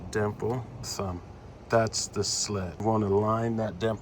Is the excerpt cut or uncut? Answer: cut